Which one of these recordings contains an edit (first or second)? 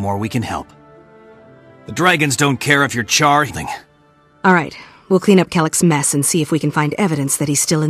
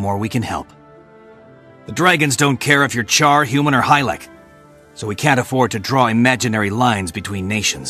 second